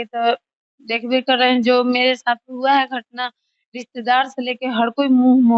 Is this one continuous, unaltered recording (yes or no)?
yes